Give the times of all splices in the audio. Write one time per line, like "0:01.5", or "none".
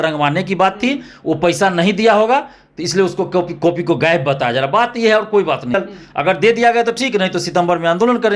0:05.7